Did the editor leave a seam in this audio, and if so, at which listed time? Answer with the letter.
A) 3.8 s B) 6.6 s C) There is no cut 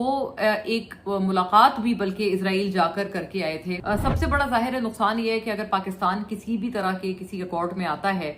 A